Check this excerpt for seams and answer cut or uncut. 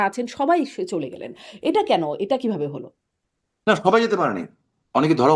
uncut